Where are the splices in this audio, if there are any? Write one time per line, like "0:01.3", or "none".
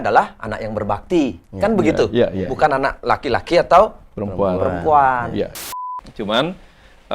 0:05.5